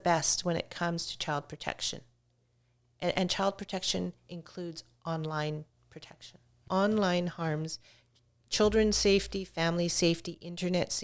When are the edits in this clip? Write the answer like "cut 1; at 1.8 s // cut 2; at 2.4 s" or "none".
cut 1; at 6.6 s